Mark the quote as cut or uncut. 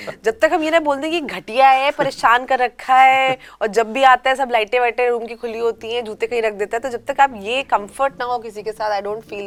uncut